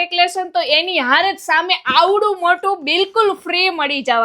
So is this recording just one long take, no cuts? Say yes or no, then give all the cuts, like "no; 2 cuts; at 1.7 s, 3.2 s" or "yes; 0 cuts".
yes; 0 cuts